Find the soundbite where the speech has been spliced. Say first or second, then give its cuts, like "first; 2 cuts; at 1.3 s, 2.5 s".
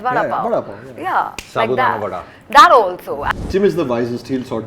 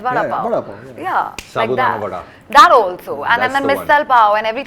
first; 1 cut; at 3.2 s